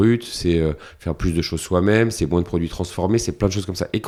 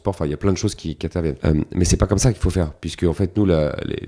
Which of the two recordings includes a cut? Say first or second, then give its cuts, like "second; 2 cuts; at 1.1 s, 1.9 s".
second; 1 cut; at 1.4 s